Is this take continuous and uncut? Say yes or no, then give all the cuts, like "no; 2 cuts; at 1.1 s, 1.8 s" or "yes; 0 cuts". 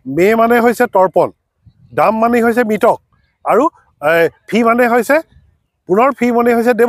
yes; 0 cuts